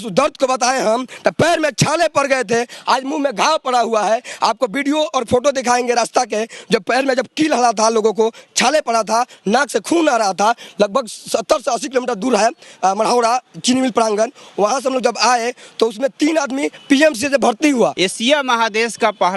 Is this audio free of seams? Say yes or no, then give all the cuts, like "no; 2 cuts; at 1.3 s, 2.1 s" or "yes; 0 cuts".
no; 1 cut; at 17.9 s